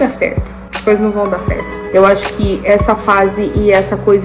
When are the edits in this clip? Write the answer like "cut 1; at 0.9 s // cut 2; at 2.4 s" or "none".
cut 1; at 1.9 s